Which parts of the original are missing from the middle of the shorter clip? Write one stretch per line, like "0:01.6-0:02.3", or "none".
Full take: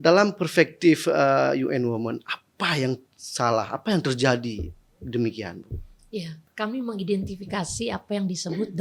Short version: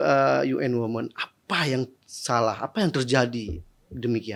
none